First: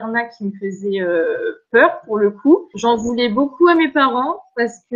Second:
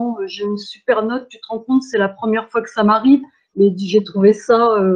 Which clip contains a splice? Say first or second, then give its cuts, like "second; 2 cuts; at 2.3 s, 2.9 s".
first; 1 cut; at 2.7 s